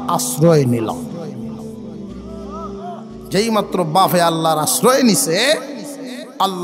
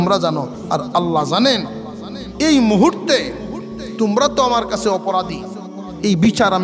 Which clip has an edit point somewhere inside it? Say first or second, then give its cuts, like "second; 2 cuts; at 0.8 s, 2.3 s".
first; 2 cuts; at 1.1 s, 2.7 s